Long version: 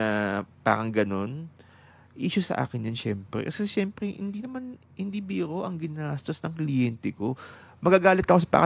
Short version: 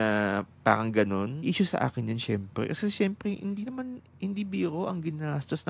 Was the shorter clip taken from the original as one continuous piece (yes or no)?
no